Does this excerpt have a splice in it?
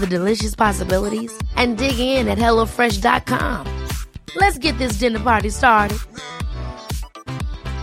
no; 0 cuts

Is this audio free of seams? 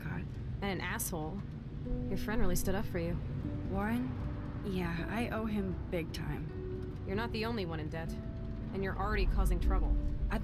yes; 0 cuts

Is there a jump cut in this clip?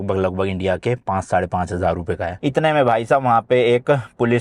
yes; 1 cut; at 2.3 s

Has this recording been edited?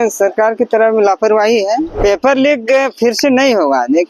yes; 1 cut; at 2.0 s

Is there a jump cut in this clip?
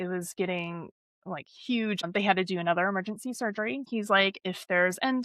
yes; 2 cuts; at 2.0 s, 3.9 s

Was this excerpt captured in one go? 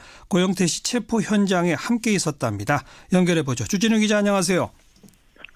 yes; 0 cuts

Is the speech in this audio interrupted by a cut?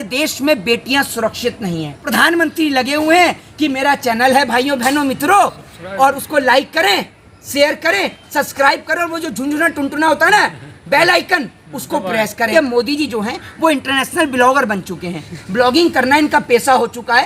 yes; 2 cuts; at 2.0 s, 12.5 s

